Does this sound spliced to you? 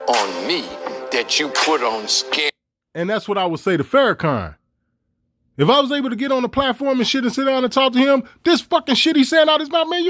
no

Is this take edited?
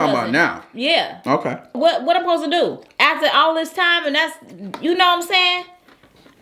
yes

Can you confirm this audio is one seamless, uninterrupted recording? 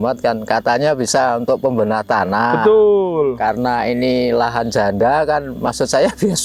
yes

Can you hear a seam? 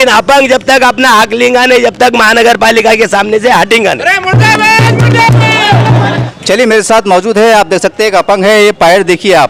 no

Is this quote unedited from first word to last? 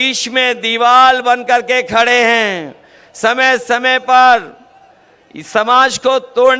yes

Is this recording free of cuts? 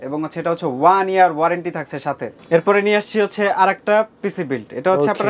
yes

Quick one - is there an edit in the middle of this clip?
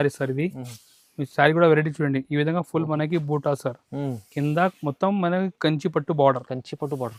no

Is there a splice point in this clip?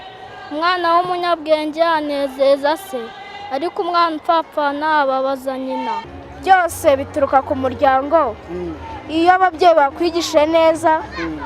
yes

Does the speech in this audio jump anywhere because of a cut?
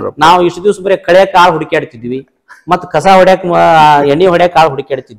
no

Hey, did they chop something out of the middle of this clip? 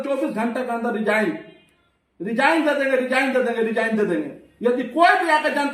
no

